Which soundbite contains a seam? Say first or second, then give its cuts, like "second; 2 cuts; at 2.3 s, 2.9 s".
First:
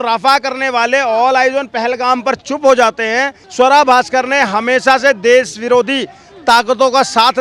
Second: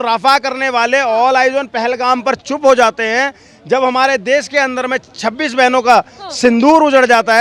first; 1 cut; at 3.4 s